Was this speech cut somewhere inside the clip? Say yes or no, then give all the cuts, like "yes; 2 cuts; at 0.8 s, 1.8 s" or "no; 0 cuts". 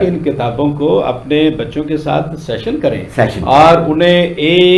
no; 0 cuts